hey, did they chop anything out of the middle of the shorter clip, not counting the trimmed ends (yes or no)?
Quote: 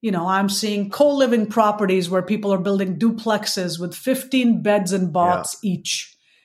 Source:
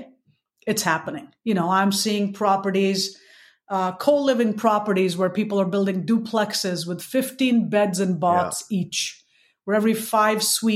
yes